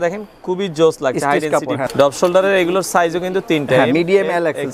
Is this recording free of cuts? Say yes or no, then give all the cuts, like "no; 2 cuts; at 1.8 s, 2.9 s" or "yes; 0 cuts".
no; 1 cut; at 1.9 s